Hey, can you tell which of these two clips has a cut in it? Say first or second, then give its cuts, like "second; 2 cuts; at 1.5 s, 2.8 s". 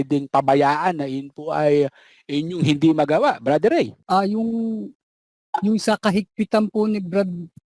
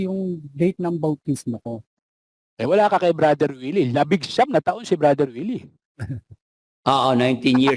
first; 1 cut; at 4.0 s